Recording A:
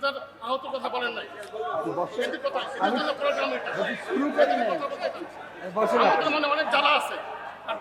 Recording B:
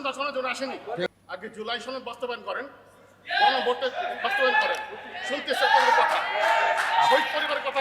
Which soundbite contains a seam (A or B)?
B